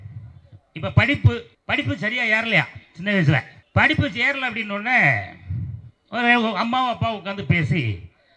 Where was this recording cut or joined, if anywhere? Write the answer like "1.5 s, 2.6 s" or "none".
1.5 s, 3.6 s